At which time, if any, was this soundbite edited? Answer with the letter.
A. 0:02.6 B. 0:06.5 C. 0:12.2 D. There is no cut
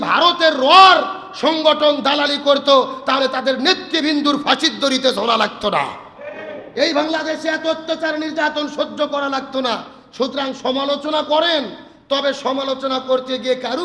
D